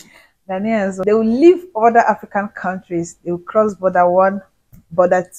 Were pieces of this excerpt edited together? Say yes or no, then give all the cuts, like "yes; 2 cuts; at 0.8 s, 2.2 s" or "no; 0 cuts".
yes; 1 cut; at 1.0 s